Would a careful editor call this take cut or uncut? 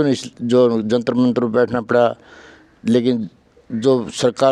uncut